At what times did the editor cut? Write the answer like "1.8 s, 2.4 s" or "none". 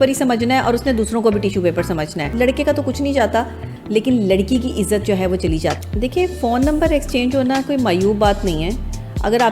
2.3 s, 5.8 s